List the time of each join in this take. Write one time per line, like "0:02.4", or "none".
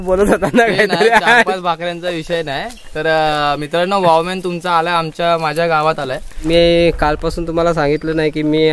0:06.5

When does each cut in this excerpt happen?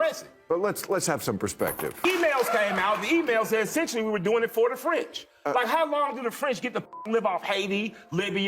0:02.0

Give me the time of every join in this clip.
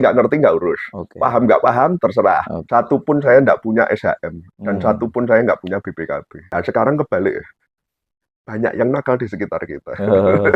0:02.6
0:06.4

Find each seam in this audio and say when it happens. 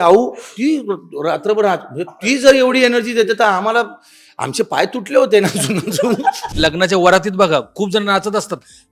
0:06.4

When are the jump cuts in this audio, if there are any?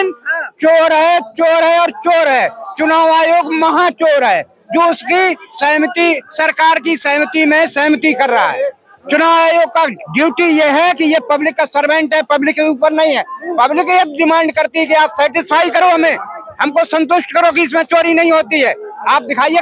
none

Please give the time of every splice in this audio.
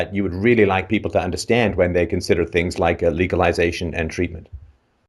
0:01.1

